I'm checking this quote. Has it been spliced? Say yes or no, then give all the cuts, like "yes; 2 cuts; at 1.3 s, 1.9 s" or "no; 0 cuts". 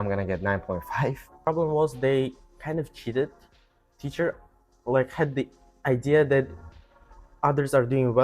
yes; 2 cuts; at 1.4 s, 3.5 s